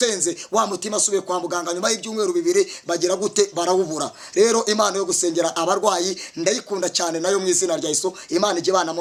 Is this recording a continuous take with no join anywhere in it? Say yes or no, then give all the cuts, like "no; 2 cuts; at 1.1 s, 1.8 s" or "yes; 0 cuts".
yes; 0 cuts